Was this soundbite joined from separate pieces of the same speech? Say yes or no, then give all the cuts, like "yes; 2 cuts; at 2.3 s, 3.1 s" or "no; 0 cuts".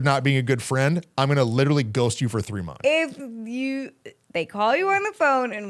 yes; 1 cut; at 2.8 s